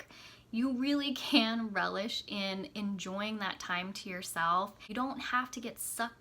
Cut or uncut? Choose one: cut